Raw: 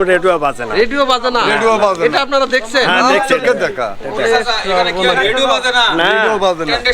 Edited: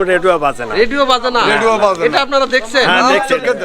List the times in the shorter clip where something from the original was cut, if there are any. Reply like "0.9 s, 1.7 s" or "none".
none